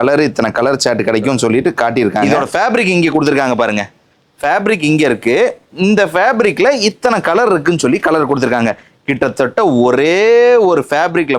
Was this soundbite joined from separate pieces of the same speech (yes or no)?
yes